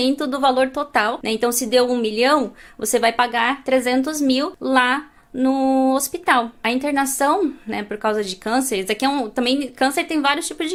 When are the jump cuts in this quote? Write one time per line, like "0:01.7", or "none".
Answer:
none